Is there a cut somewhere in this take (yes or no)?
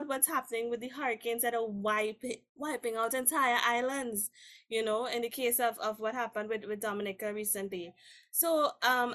no